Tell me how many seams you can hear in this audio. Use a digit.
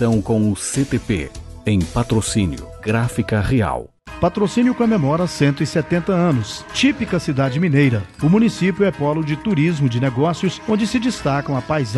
1